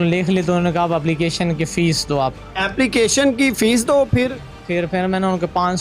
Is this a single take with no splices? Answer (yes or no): yes